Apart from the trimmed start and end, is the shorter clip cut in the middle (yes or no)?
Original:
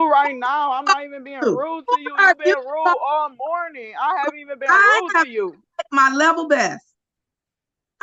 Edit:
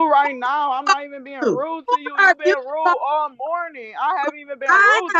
no